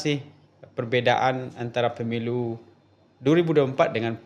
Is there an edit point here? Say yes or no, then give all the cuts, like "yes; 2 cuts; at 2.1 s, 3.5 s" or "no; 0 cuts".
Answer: no; 0 cuts